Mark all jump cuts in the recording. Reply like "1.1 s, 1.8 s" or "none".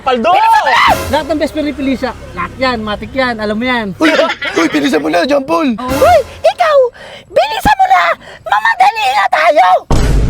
5.8 s